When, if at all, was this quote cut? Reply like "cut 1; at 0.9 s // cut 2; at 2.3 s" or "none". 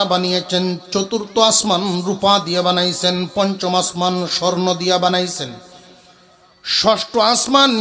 none